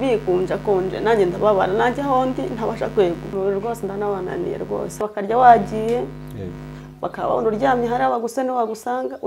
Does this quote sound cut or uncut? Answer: cut